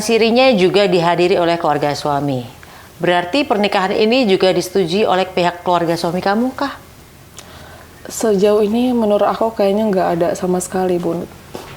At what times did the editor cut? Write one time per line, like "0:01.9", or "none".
none